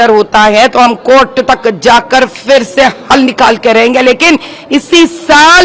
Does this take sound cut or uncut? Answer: uncut